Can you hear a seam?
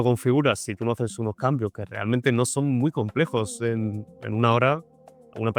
no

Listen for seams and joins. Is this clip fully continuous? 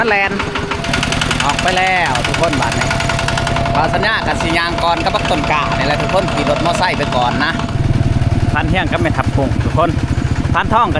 no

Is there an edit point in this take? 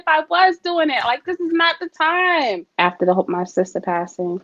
yes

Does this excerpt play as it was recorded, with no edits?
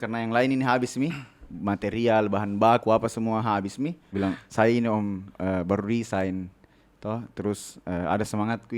no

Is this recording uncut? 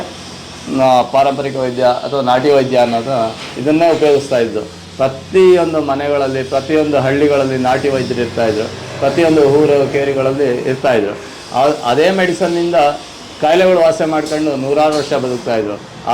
yes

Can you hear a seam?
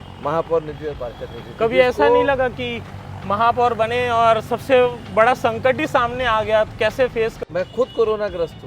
yes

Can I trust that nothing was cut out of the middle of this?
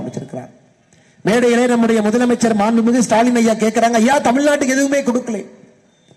yes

